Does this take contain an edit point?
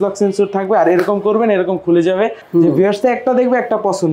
yes; 1 cut; at 2.4 s

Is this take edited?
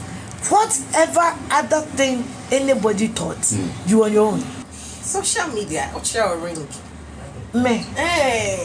yes; 1 cut; at 4.6 s

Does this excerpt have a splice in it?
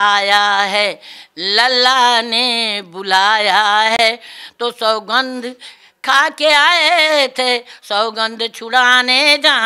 no; 0 cuts

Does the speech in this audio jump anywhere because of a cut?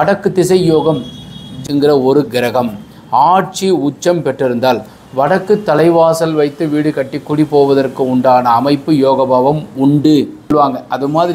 yes; 2 cuts; at 1.6 s, 10.5 s

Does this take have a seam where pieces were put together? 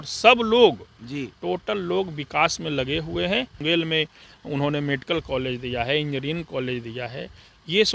yes; 1 cut; at 3.6 s

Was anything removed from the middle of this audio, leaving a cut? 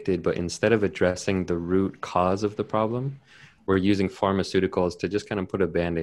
no; 0 cuts

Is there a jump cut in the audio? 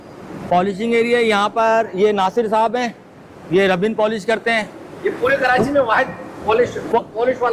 no; 0 cuts

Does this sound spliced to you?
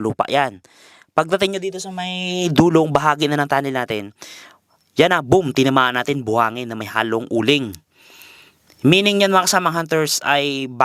no; 0 cuts

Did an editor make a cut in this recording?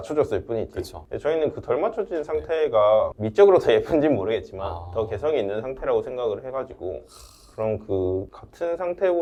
no; 0 cuts

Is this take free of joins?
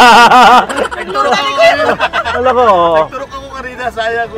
yes; 0 cuts

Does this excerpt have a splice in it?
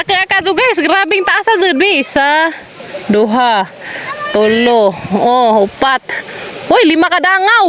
no; 0 cuts

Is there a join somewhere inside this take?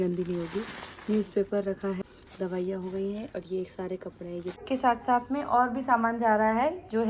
yes; 2 cuts; at 2.0 s, 4.6 s

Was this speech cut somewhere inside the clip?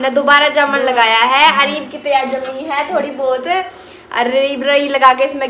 no; 0 cuts

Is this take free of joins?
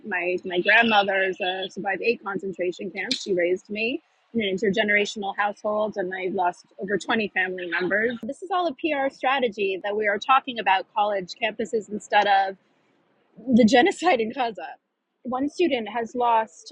no; 3 cuts; at 8.2 s, 9.8 s, 15.2 s

